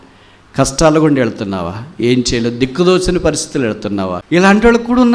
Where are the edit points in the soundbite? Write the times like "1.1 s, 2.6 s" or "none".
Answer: 4.2 s

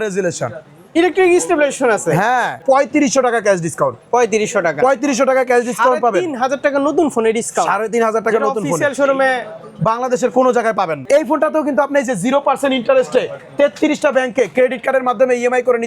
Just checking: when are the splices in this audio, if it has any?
2.6 s, 11.0 s

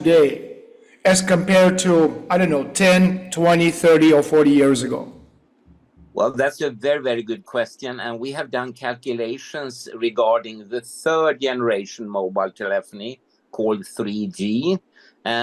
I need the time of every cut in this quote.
none

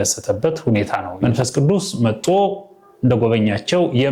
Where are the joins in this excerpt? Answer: 1.1 s

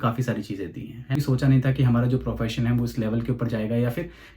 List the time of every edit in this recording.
1.2 s

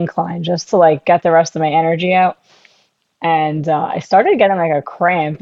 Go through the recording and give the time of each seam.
none

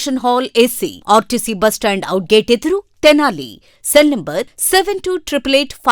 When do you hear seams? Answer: none

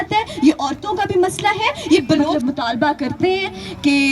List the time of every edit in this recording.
2.3 s

